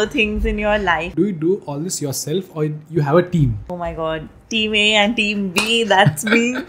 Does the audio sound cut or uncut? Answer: cut